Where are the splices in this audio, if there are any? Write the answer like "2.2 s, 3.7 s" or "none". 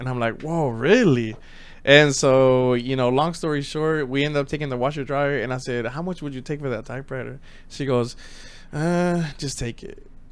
none